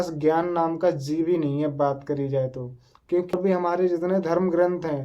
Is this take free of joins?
no; 1 cut; at 3.4 s

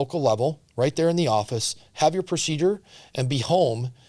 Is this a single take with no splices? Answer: yes; 0 cuts

